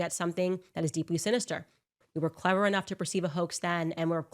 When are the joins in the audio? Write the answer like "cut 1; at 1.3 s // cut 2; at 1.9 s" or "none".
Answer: cut 1; at 2.0 s